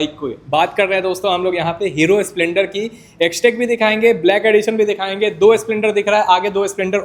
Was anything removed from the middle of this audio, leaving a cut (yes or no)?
no